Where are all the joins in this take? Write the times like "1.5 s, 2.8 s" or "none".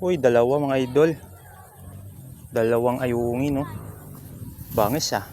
none